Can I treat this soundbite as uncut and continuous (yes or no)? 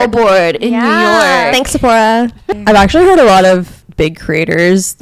no